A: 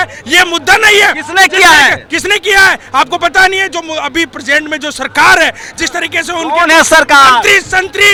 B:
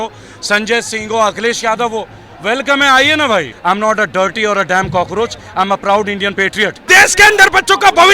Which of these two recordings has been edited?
B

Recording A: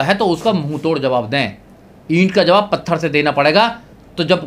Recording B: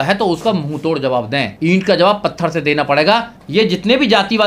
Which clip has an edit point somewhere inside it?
B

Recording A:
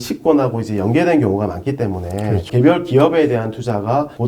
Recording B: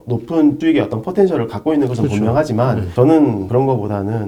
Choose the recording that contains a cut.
A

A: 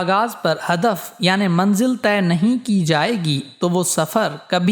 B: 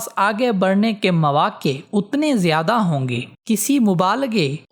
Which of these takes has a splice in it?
B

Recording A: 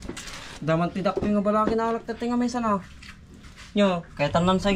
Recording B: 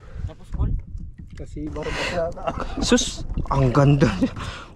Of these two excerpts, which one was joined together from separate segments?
B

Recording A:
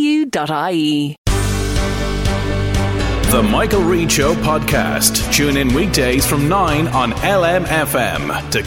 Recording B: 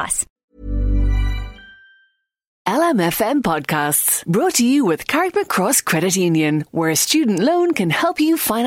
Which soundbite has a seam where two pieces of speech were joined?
B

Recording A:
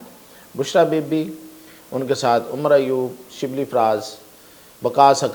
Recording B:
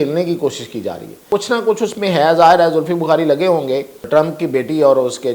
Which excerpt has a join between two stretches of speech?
B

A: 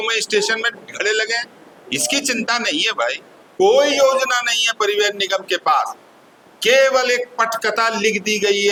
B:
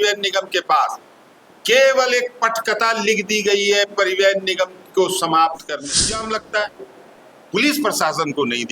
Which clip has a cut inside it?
B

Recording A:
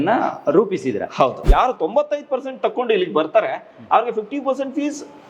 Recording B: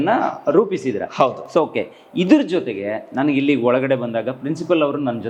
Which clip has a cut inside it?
A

